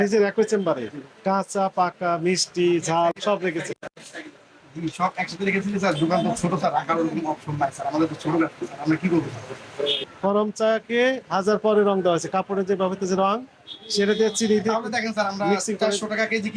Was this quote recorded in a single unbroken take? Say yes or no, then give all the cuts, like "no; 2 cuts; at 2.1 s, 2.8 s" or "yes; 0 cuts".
no; 1 cut; at 10.0 s